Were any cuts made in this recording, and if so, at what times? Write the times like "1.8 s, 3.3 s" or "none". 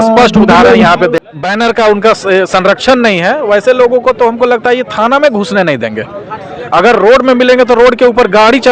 1.2 s